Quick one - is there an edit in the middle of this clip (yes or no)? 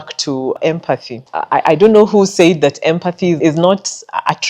yes